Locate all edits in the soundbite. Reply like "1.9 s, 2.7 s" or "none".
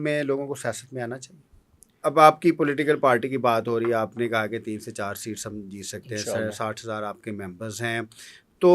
1.9 s